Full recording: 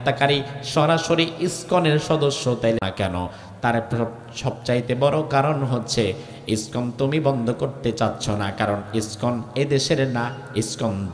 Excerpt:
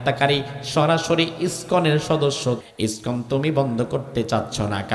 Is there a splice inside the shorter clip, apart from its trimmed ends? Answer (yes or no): yes